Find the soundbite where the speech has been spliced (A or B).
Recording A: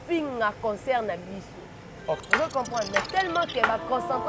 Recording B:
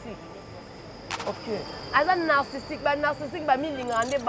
A